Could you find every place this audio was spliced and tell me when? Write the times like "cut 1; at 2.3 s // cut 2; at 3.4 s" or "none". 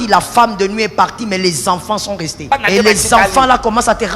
cut 1; at 2.5 s